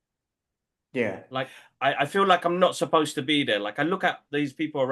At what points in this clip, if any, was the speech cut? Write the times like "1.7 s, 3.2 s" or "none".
none

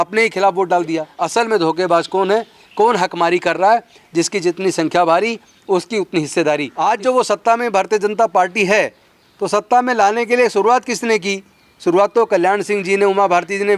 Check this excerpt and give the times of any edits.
1.1 s, 6.7 s

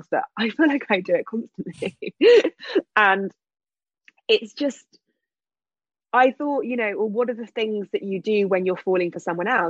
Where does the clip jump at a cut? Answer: none

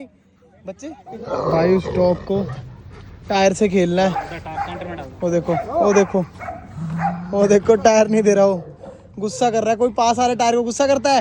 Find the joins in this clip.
1.4 s

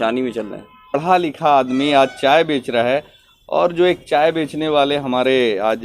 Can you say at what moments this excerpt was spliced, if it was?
0.9 s

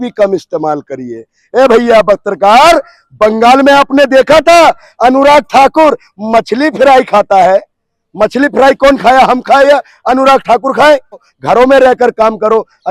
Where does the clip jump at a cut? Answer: 11.3 s

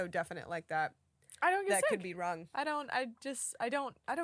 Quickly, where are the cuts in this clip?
none

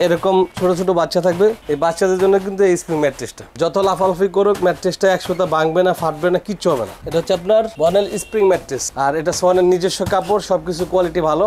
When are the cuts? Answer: none

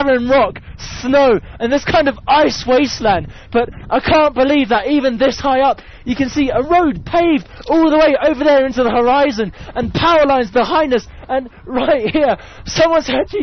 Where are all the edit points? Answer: none

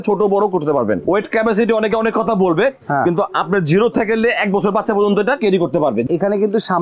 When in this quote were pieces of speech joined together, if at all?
1.0 s, 6.1 s

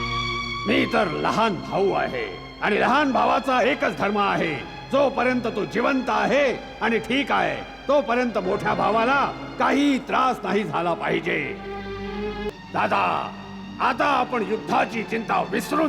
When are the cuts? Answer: 12.5 s

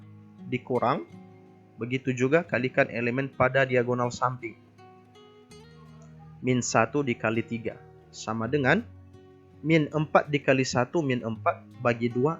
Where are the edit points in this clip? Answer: 4.5 s, 6.4 s

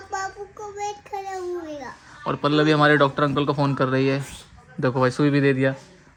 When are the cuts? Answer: none

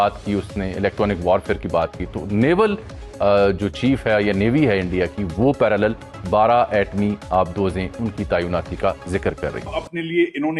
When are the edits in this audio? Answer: 9.7 s

